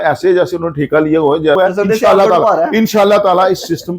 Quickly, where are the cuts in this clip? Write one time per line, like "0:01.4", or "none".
0:01.6